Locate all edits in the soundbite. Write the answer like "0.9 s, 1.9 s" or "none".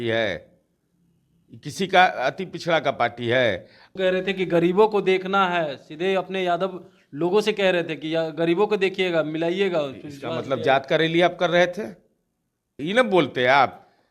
3.8 s, 12.8 s